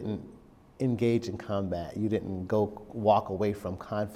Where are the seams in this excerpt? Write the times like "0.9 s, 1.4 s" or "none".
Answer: none